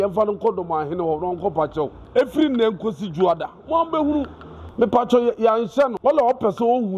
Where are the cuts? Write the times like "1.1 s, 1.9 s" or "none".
2.0 s, 4.6 s, 6.0 s